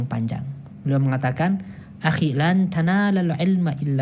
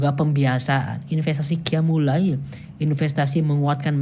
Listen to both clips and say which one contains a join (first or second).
second